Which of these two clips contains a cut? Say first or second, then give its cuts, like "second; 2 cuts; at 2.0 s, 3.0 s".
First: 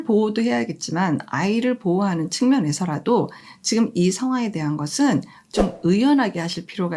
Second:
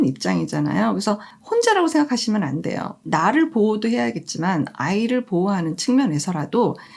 second; 1 cut; at 1.3 s